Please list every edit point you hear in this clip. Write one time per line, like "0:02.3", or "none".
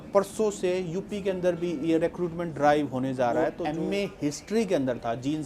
0:03.6